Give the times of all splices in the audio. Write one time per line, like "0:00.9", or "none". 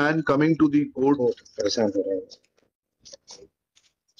none